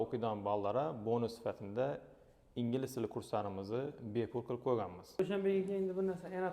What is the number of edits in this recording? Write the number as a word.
one